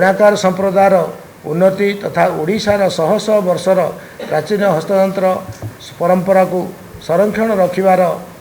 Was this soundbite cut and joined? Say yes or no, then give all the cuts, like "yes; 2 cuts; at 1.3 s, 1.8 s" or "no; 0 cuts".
no; 0 cuts